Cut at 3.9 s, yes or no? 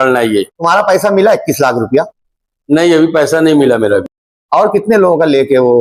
no